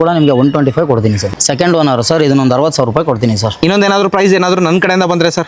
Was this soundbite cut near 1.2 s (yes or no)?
yes